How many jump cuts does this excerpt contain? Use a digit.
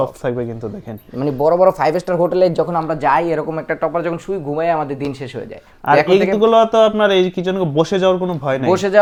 0